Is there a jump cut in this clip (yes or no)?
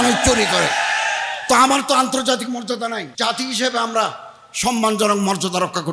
yes